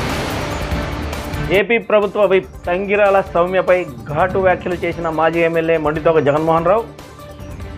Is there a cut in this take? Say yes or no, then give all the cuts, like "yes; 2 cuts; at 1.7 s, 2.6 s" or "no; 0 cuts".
yes; 1 cut; at 1.3 s